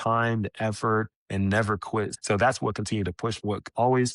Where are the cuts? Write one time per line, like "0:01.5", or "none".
0:02.2
0:03.4